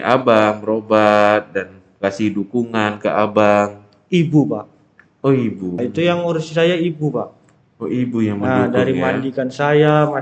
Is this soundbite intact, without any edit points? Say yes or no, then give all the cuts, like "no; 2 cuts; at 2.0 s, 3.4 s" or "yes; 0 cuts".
no; 1 cut; at 5.8 s